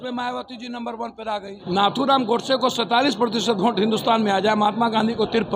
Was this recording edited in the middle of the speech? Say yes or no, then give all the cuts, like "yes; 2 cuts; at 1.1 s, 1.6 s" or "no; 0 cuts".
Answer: yes; 1 cut; at 1.5 s